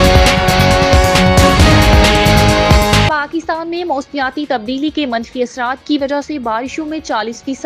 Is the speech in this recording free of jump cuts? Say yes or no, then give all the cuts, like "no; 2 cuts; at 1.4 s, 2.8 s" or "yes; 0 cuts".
no; 2 cuts; at 1.0 s, 3.1 s